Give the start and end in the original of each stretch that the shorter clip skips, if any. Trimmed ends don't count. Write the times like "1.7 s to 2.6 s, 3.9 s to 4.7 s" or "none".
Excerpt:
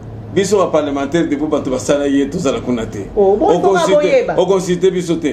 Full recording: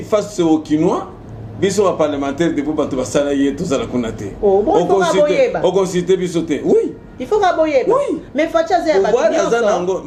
none